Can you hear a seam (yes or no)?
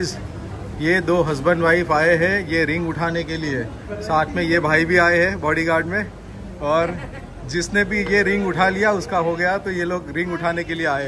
no